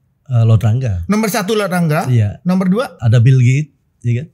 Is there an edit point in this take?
yes; 1 cut; at 3.0 s

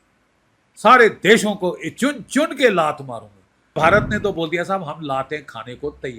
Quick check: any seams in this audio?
yes; 1 cut; at 3.8 s

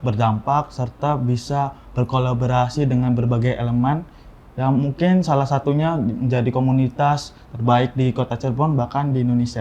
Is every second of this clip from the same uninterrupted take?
yes; 0 cuts

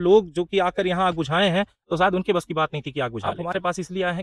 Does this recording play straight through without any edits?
no; 1 cut; at 3.2 s

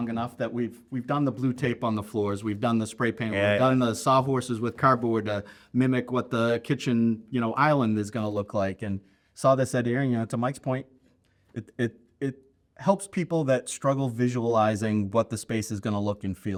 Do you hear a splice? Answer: no; 0 cuts

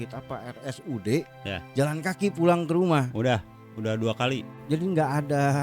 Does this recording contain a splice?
yes; 1 cut; at 4.6 s

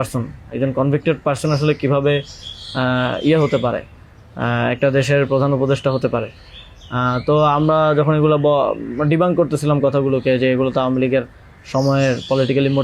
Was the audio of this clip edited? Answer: no; 0 cuts

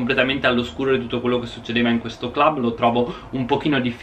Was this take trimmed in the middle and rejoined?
no; 0 cuts

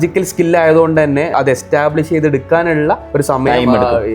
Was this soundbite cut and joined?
yes; 1 cut; at 1.3 s

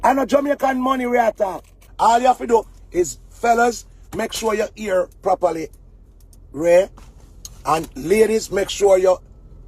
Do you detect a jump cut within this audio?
yes; 1 cut; at 1.5 s

